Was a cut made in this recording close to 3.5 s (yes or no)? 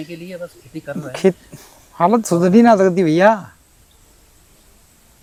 no